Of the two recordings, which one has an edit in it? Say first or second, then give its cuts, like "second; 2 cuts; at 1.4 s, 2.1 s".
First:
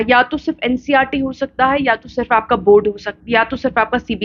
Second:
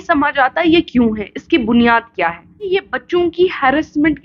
second; 1 cut; at 2.7 s